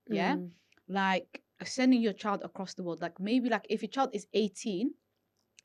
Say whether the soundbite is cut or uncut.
uncut